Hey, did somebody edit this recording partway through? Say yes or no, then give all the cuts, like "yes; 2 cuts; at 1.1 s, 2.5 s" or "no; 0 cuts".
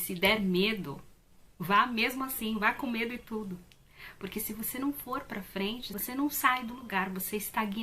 yes; 1 cut; at 5.9 s